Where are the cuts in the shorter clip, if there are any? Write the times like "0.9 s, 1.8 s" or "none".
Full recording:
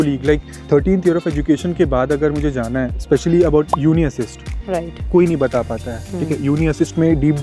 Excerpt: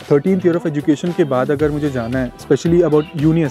none